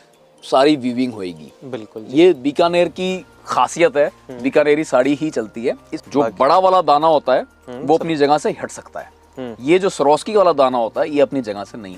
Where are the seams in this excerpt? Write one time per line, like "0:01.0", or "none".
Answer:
0:05.9